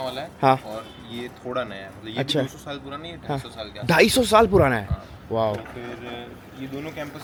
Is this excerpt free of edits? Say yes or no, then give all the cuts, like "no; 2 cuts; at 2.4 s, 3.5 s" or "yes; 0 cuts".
yes; 0 cuts